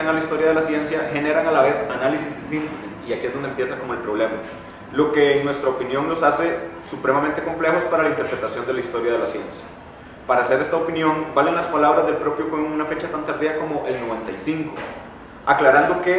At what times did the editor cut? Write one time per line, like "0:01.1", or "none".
0:11.0